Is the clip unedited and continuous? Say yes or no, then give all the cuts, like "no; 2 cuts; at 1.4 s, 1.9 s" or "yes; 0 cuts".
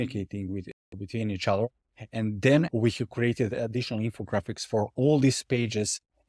no; 1 cut; at 2.7 s